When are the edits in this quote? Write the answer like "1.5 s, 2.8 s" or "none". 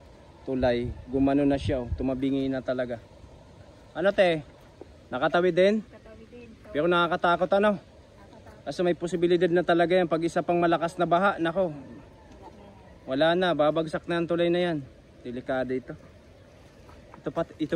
none

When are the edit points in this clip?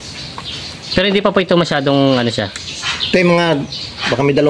none

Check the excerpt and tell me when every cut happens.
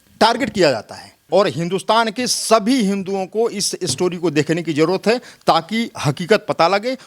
1.2 s

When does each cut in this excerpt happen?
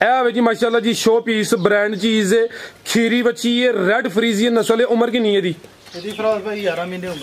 none

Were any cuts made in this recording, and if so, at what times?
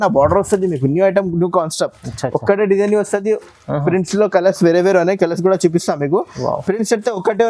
none

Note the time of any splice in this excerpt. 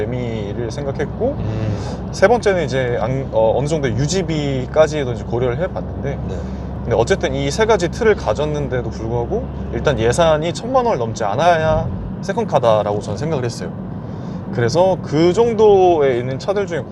none

